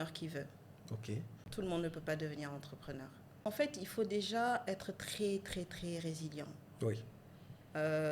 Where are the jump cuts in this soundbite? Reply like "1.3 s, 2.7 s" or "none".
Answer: 1.4 s, 3.5 s